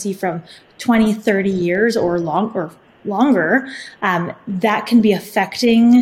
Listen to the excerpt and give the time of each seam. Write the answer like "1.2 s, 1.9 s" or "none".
none